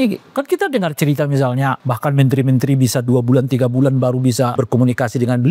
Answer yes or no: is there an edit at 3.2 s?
no